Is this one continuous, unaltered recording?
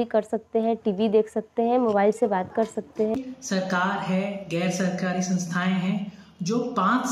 no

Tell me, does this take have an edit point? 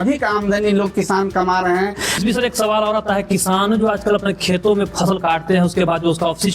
yes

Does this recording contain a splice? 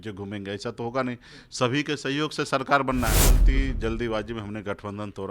yes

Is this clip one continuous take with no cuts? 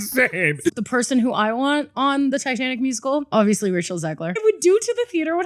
no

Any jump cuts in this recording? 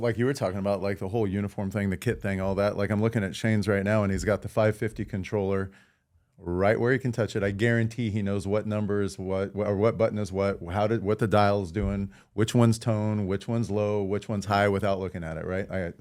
no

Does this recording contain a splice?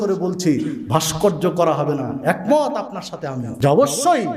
no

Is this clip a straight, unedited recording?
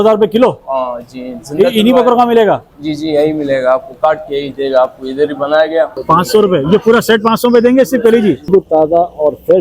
no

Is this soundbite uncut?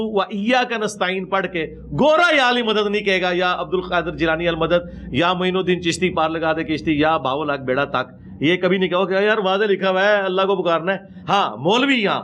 yes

